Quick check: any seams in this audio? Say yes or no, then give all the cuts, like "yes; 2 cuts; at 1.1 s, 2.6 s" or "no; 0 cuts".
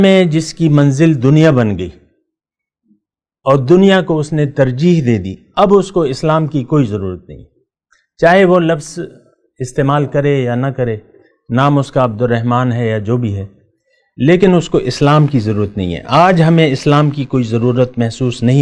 no; 0 cuts